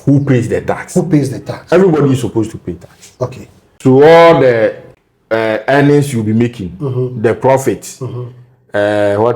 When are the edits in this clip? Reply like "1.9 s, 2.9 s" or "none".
3.7 s